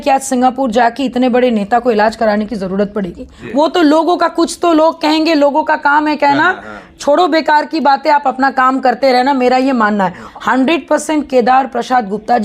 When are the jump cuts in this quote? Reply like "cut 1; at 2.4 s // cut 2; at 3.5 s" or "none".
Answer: cut 1; at 3.3 s // cut 2; at 10.2 s

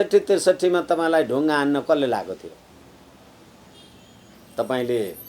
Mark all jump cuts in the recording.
cut 1; at 2.7 s

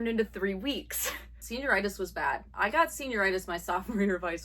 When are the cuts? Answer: cut 1; at 1.4 s

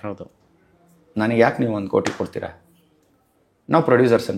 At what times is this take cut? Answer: none

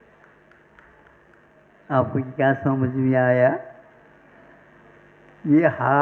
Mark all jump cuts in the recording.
none

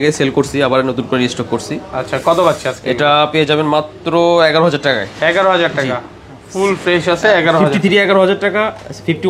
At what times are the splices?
none

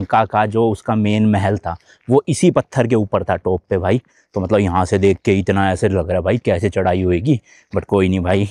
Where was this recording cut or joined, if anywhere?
none

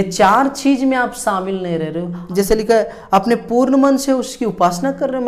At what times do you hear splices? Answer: cut 1; at 2.2 s

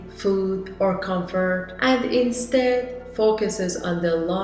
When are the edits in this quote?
none

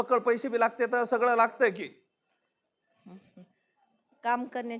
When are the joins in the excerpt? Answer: none

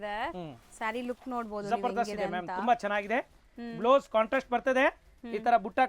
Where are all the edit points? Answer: none

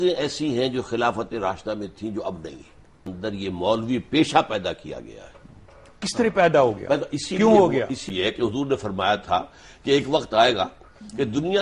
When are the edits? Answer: cut 1; at 3.1 s // cut 2; at 8.1 s

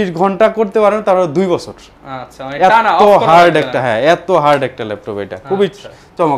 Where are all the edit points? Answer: none

